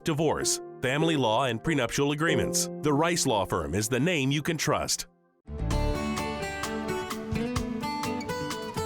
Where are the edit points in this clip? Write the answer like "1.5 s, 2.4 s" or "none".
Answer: 5.6 s